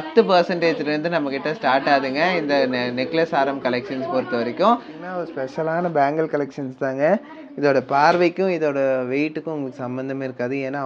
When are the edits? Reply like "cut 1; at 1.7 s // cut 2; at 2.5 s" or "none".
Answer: cut 1; at 5.0 s